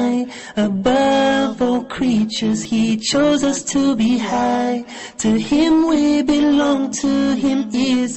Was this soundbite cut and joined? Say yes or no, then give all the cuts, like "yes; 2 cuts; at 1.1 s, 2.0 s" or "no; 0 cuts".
yes; 1 cut; at 2.6 s